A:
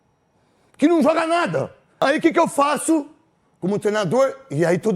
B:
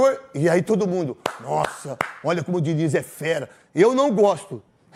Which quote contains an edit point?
A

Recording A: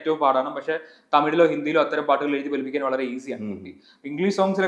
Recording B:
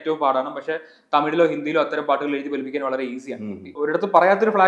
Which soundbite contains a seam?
B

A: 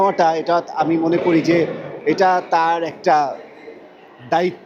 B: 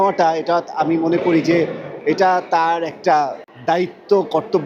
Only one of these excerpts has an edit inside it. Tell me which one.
B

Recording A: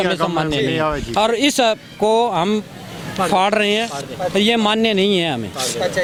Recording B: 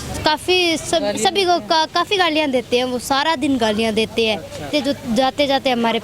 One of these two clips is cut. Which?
B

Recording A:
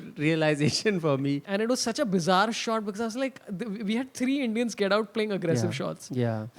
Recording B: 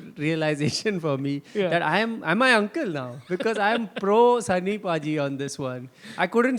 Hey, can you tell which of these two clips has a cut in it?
A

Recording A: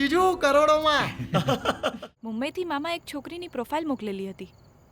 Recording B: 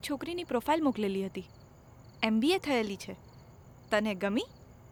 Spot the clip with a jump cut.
A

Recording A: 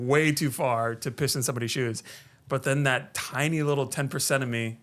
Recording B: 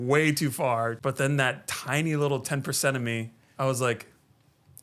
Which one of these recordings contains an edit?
B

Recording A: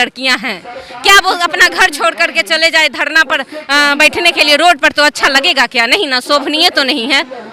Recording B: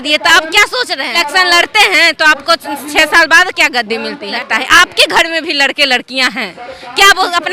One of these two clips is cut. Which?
B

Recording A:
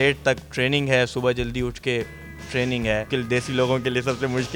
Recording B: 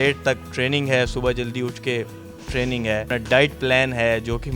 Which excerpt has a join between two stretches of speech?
A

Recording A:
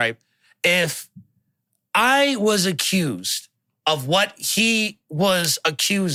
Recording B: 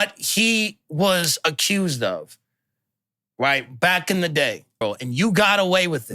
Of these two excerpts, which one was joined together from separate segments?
B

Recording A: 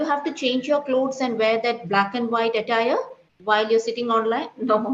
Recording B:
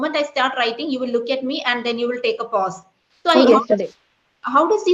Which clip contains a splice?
B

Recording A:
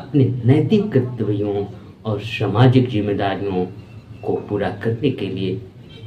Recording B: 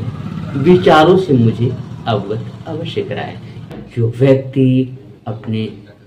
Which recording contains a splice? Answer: B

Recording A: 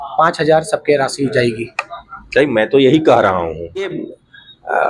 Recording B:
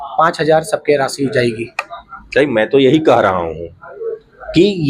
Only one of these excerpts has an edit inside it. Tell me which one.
A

